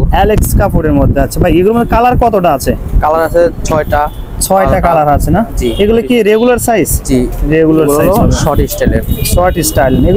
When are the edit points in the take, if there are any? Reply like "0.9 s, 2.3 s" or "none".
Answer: none